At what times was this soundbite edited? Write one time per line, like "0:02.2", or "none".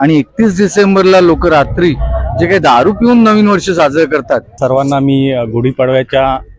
0:04.6